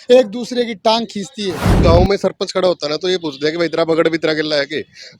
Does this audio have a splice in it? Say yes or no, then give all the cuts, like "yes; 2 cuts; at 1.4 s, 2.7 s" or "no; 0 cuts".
yes; 1 cut; at 1.8 s